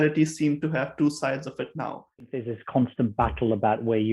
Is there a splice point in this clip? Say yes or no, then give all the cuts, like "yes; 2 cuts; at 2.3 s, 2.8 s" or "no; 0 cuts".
yes; 1 cut; at 2.3 s